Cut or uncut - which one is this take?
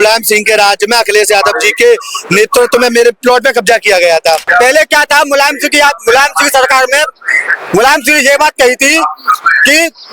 cut